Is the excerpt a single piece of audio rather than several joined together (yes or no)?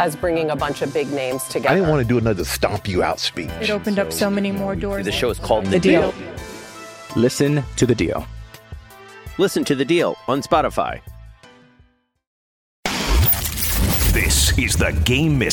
no